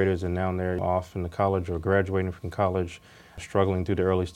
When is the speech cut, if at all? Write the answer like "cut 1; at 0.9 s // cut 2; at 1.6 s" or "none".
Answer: cut 1; at 0.8 s // cut 2; at 3.4 s